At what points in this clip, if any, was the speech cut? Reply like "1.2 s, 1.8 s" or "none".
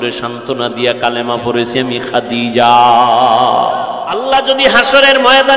4.3 s